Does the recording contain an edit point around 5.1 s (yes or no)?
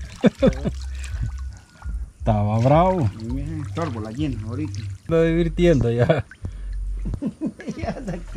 yes